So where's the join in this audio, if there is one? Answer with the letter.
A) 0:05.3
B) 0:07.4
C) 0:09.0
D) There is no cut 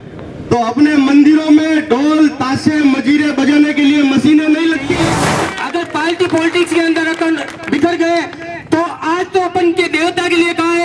A